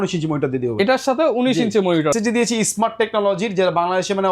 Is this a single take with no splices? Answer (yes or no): no